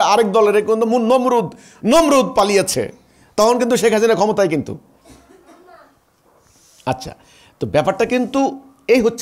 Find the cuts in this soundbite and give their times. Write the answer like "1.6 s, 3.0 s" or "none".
none